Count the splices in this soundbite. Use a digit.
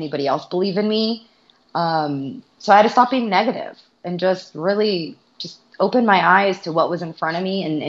0